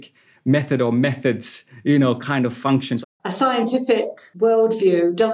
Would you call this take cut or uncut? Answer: cut